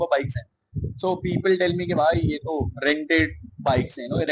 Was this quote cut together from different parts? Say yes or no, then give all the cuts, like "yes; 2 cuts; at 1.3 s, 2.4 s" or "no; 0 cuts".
no; 0 cuts